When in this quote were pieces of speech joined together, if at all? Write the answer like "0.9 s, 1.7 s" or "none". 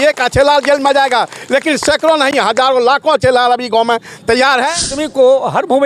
4.9 s